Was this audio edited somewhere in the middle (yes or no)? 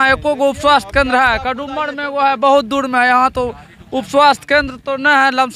no